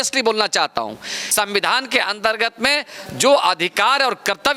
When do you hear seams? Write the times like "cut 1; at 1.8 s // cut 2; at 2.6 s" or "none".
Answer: cut 1; at 1.2 s

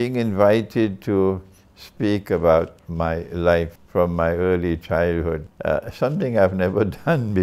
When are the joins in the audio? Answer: cut 1; at 3.8 s // cut 2; at 5.5 s

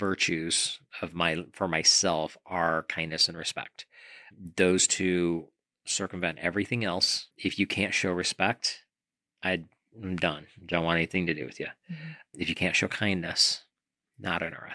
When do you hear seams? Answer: cut 1; at 4.3 s

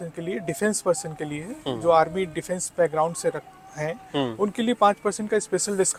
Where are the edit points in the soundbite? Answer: none

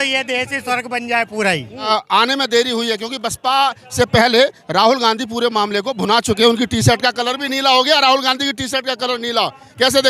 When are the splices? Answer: cut 1; at 1.9 s

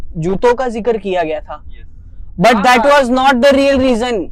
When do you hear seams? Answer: none

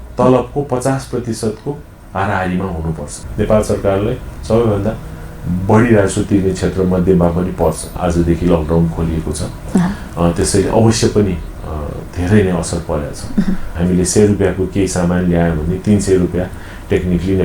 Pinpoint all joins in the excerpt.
cut 1; at 3.2 s // cut 2; at 7.9 s // cut 3; at 13.7 s

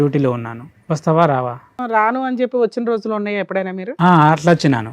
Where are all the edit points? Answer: cut 1; at 1.8 s

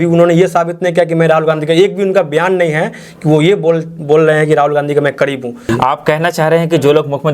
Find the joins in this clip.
cut 1; at 5.7 s

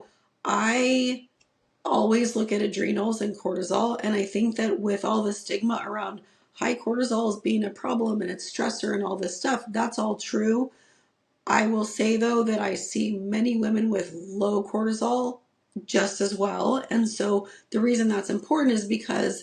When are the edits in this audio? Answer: none

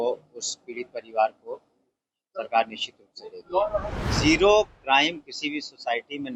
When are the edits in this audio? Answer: cut 1; at 3.7 s

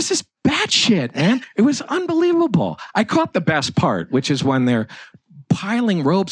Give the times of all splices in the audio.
cut 1; at 1.5 s

